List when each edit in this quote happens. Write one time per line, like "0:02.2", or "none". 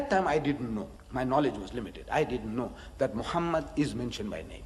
0:01.0